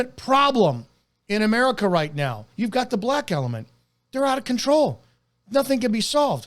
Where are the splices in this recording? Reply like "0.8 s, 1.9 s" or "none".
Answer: 2.5 s

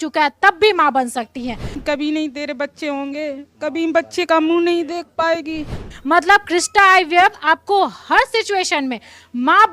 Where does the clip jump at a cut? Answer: 1.8 s, 5.9 s

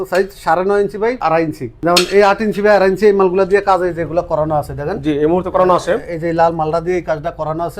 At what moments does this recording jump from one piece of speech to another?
1.2 s

